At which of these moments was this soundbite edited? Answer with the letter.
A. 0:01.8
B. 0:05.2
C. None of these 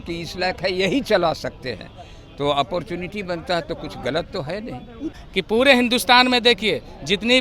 B